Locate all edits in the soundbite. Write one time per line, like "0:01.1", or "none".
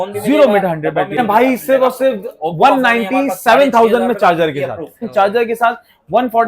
0:01.2
0:05.0